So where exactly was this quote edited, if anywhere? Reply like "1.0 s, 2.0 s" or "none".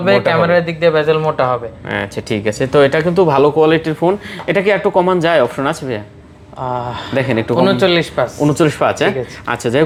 none